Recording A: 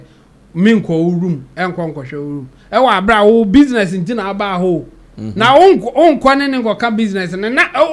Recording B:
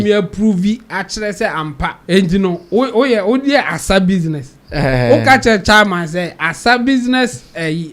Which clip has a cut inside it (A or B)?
B